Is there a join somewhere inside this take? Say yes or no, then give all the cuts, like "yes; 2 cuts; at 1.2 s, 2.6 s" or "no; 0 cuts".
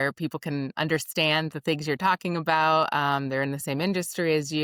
no; 0 cuts